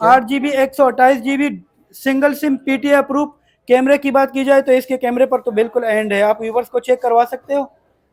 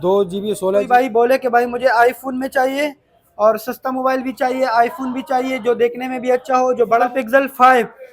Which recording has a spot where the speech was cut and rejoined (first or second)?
second